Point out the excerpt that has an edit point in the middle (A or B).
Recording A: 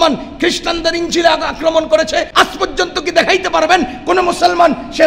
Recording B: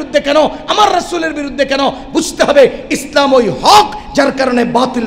A